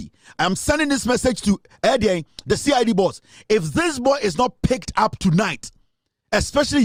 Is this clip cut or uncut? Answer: uncut